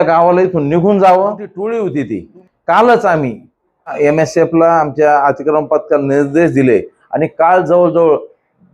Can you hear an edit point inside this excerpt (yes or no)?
yes